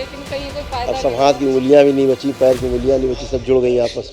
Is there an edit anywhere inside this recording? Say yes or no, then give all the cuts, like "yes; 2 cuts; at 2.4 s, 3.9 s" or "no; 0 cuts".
no; 0 cuts